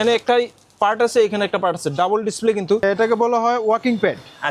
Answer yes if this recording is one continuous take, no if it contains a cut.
no